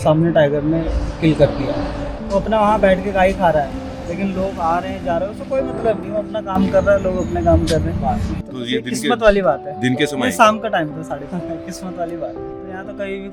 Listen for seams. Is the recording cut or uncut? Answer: uncut